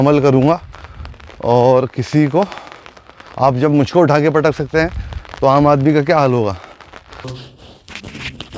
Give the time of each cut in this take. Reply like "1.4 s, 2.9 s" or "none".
7.4 s